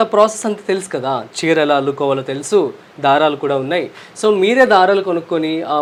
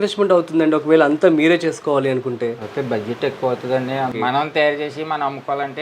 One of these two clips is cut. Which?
second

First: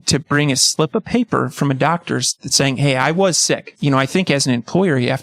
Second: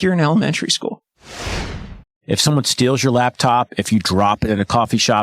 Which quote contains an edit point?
second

